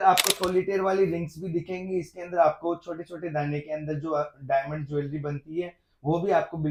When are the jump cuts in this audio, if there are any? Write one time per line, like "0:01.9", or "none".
none